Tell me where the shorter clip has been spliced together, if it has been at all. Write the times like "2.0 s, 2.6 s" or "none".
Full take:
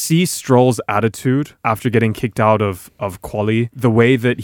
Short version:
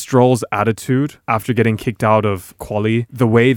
2.5 s